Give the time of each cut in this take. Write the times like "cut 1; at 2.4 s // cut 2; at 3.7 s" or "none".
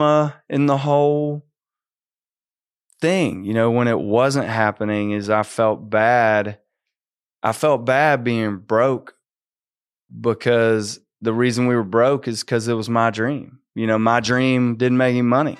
none